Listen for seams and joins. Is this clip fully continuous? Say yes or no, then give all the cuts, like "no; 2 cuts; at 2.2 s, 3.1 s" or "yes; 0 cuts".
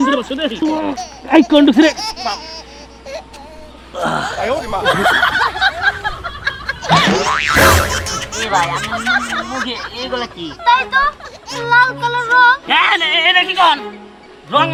yes; 0 cuts